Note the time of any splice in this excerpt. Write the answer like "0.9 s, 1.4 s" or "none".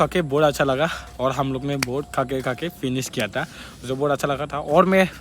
none